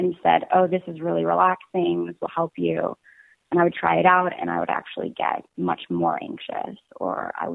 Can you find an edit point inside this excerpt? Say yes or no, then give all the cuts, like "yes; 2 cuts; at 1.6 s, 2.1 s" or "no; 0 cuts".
no; 0 cuts